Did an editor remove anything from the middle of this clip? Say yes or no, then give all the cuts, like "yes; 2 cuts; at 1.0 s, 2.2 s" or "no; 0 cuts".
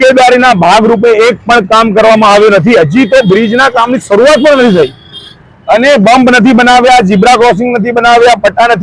no; 0 cuts